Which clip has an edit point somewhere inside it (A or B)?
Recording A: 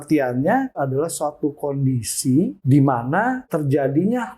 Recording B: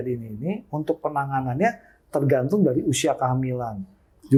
A